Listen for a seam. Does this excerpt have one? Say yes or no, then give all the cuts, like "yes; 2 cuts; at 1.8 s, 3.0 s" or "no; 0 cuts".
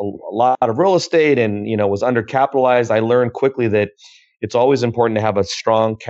no; 0 cuts